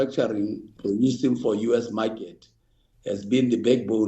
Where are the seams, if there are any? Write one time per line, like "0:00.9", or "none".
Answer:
none